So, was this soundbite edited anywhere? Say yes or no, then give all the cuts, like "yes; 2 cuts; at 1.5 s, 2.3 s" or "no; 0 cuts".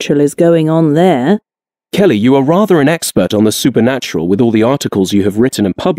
yes; 1 cut; at 1.8 s